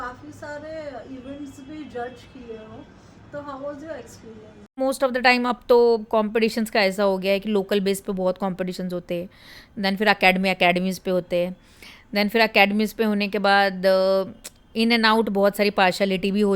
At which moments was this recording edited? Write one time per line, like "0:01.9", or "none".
0:04.7